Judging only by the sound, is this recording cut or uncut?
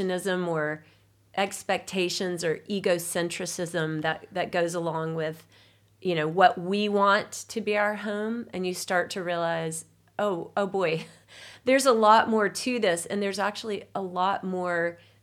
uncut